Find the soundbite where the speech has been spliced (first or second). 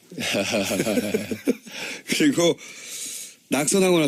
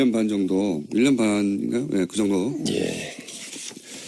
second